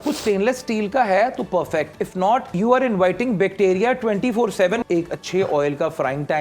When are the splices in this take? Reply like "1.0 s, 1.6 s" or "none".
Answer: 2.5 s, 4.8 s